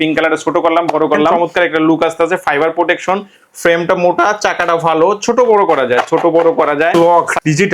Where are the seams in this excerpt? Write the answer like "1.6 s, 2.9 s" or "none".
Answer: 1.3 s, 6.9 s